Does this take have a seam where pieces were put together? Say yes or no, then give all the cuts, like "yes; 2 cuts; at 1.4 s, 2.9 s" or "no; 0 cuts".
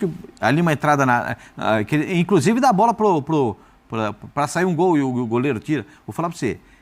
no; 0 cuts